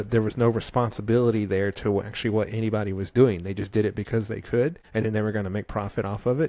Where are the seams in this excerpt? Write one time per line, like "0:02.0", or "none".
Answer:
0:04.8

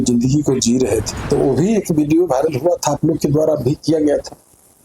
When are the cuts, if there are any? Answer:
0:01.1

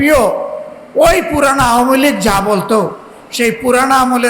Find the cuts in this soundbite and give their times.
none

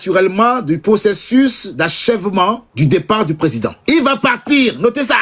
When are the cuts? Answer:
0:02.7
0:03.8

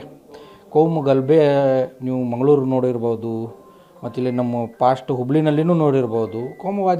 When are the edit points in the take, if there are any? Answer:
none

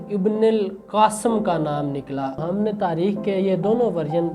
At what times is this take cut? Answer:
0:02.4

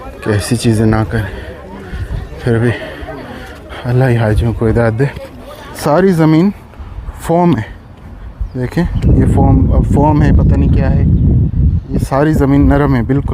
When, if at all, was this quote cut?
0:05.8

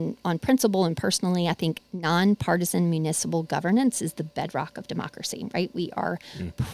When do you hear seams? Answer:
none

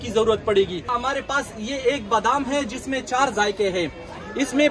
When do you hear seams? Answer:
0:00.9

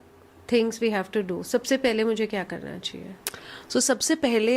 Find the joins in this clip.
none

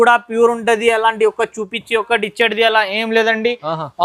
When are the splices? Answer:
none

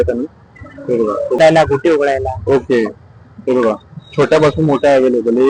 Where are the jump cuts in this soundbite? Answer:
0:01.4

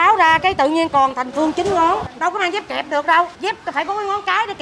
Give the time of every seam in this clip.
0:02.1
0:03.3

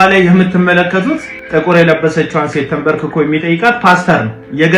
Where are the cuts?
0:01.3

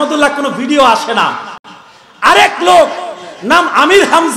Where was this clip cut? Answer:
none

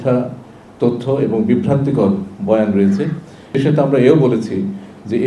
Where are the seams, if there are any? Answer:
0:03.6

